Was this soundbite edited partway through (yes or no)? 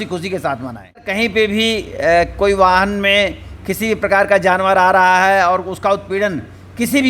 yes